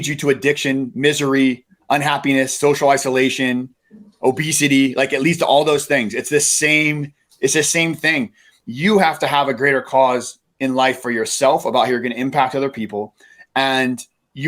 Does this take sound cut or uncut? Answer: uncut